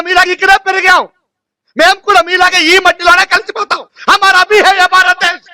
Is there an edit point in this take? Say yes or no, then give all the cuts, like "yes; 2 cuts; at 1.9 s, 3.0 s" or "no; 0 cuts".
no; 0 cuts